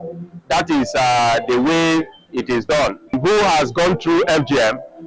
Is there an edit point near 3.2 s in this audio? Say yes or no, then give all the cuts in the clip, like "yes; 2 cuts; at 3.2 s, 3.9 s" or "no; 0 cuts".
yes; 1 cut; at 3.2 s